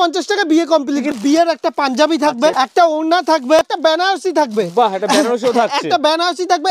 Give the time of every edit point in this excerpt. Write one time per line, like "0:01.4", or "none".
0:01.1
0:02.5
0:03.7